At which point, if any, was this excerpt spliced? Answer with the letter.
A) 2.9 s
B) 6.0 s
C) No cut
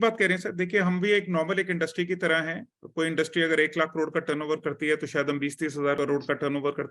B